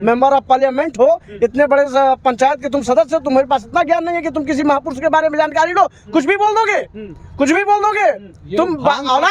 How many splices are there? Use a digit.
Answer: 0